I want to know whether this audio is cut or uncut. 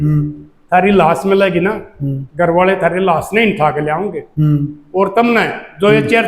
uncut